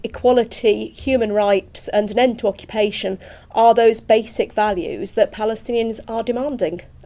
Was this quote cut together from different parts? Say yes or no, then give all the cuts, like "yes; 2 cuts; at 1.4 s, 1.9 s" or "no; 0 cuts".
yes; 1 cut; at 4.7 s